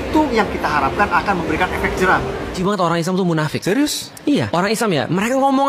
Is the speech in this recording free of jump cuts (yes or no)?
no